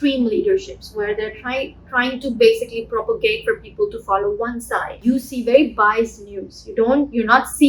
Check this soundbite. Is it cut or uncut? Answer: cut